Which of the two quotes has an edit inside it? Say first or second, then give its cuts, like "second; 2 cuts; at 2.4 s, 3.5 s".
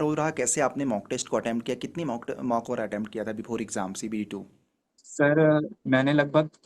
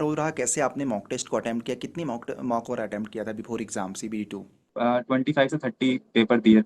second; 1 cut; at 4.7 s